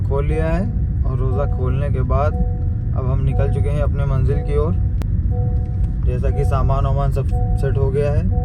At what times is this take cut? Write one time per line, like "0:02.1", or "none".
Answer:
none

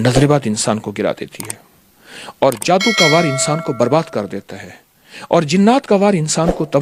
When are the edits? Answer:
none

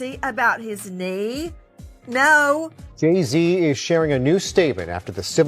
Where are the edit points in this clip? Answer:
0:02.8

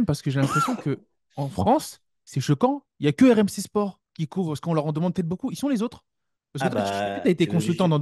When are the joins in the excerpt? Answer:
none

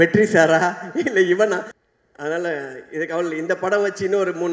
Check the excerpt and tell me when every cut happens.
0:01.7

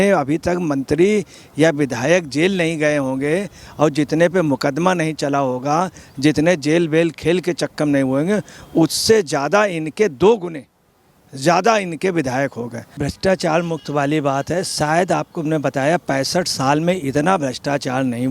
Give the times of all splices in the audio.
0:13.1

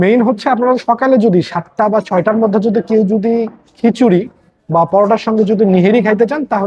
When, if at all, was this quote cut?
none

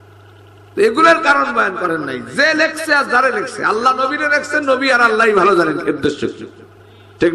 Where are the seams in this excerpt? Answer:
none

